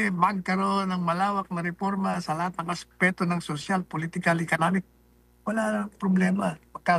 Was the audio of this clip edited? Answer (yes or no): no